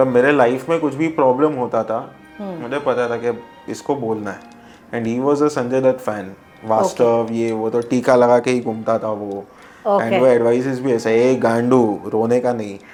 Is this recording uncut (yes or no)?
yes